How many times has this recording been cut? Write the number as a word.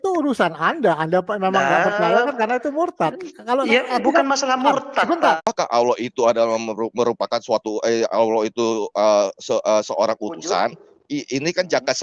one